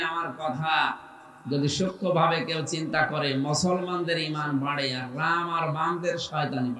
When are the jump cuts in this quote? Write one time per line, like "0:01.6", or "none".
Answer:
none